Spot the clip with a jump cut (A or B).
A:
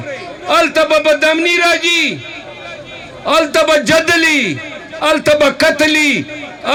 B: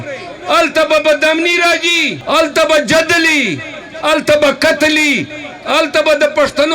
B